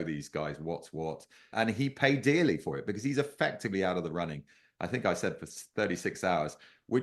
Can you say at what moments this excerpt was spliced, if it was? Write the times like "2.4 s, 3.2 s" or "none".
1.5 s